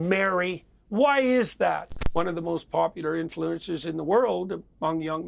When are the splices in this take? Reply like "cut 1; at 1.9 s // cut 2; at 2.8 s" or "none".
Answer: cut 1; at 1.9 s